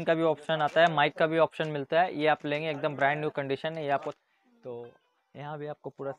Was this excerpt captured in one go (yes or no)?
no